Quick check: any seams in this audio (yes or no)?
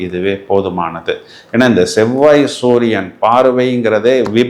no